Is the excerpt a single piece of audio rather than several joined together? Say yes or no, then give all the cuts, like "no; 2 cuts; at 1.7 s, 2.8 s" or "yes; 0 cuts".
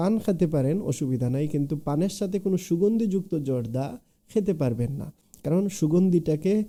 yes; 0 cuts